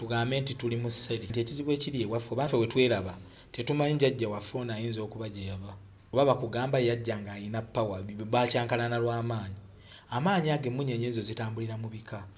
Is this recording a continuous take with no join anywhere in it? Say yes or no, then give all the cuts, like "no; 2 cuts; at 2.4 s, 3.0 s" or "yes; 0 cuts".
no; 3 cuts; at 1.3 s, 2.5 s, 5.9 s